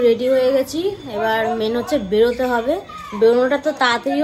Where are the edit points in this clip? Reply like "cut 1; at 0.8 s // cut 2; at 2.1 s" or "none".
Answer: none